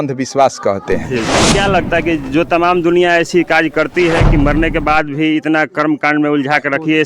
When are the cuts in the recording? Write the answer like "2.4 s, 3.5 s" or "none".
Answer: 1.3 s